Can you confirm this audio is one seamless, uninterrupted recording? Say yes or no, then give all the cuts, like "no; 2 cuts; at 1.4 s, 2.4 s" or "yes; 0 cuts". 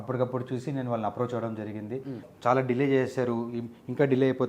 no; 1 cut; at 2.2 s